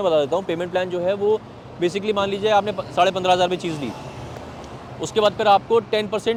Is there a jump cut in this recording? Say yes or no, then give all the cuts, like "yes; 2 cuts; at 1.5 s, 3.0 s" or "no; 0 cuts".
no; 0 cuts